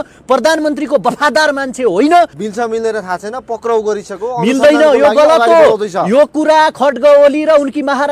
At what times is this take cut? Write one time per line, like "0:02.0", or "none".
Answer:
0:02.4